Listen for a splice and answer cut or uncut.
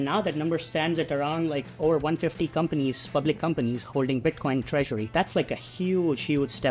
cut